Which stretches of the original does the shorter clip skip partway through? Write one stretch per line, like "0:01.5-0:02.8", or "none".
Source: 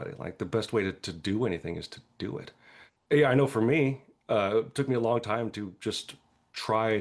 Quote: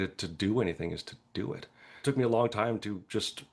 0:02.8-0:04.7